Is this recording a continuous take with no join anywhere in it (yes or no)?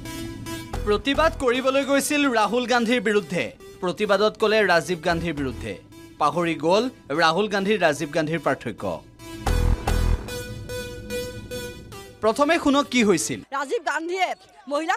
no